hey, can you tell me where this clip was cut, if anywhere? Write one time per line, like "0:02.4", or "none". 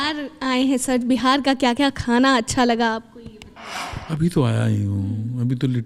none